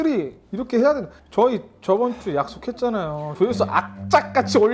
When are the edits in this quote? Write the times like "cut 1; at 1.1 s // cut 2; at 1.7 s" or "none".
cut 1; at 3.2 s